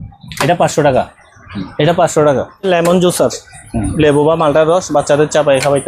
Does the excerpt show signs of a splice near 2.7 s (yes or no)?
yes